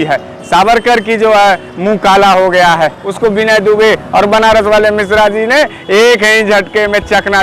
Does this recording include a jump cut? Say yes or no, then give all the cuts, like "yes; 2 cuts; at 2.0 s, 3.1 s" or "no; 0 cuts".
yes; 1 cut; at 3.0 s